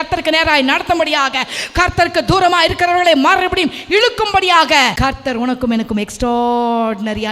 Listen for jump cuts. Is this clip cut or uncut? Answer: cut